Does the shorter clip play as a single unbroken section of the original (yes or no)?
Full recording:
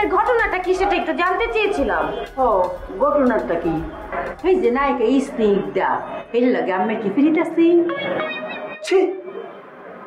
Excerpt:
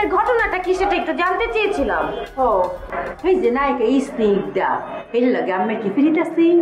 no